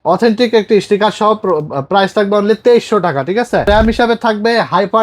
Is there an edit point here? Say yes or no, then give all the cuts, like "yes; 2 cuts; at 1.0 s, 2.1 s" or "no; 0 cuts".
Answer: yes; 1 cut; at 3.7 s